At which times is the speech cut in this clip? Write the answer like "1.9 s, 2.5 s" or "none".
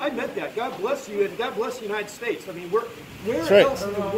none